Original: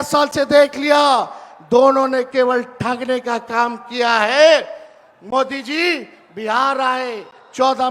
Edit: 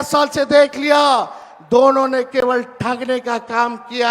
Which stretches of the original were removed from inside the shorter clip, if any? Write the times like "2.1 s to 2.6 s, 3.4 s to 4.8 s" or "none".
none